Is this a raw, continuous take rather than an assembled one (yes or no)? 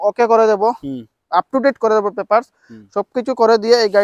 yes